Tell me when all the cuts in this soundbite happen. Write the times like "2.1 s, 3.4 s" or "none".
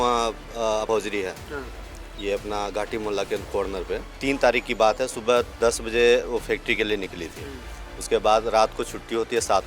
0.9 s, 4.0 s